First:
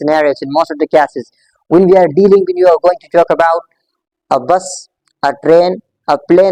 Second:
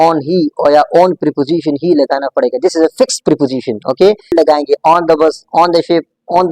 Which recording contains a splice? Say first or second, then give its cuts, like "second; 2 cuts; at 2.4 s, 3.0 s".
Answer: second; 1 cut; at 4.3 s